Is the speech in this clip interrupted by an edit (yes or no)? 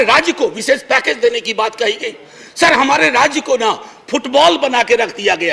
no